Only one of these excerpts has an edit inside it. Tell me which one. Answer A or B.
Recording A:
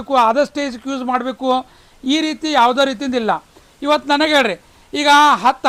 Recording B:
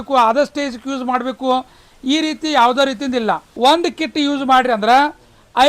B